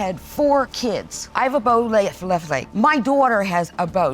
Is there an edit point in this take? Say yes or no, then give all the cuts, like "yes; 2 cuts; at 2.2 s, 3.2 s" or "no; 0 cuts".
yes; 1 cut; at 0.9 s